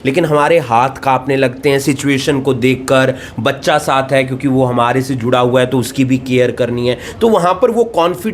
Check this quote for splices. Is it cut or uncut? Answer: uncut